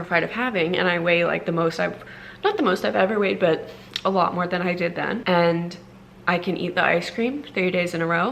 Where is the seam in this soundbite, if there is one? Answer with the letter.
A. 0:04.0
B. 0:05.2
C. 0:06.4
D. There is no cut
B